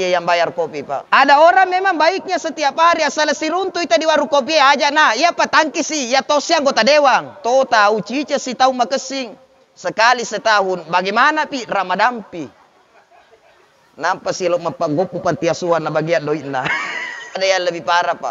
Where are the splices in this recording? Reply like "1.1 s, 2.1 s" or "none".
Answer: 1.0 s, 7.4 s, 17.4 s